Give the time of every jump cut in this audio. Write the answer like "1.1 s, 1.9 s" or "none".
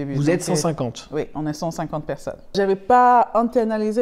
2.5 s